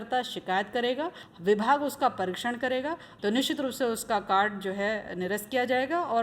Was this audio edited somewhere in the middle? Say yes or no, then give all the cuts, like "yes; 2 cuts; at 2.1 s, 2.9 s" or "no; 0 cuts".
yes; 2 cuts; at 1.2 s, 3.1 s